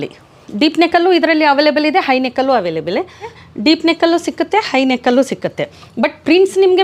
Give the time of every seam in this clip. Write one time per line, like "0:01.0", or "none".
0:03.4